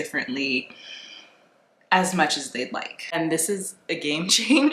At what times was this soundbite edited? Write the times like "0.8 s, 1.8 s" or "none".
3.1 s